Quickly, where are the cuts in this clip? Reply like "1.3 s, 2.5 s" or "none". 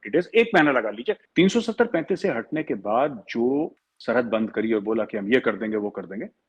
1.2 s, 3.9 s